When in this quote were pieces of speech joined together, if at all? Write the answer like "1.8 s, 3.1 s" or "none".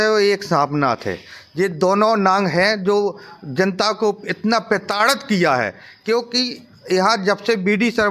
none